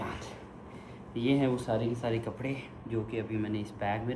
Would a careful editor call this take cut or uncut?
uncut